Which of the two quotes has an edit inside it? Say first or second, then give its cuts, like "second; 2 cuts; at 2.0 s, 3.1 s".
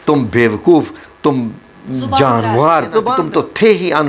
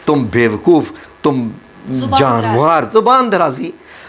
first; 1 cut; at 3.1 s